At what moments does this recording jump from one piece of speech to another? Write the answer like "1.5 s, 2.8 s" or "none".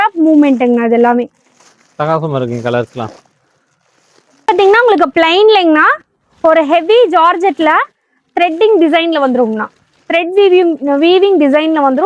none